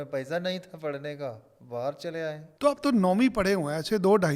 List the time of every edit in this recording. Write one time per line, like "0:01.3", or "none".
0:02.5